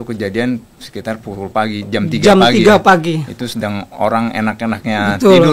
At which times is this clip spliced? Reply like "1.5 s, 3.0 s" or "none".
none